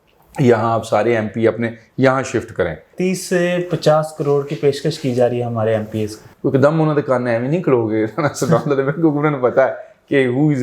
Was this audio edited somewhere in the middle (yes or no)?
yes